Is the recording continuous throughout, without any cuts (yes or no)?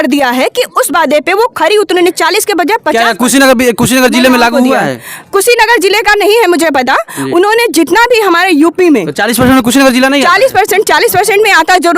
yes